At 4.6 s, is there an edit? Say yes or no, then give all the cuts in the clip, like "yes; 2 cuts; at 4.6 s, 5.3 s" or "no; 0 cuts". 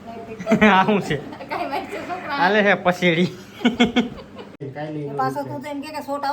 yes; 1 cut; at 4.6 s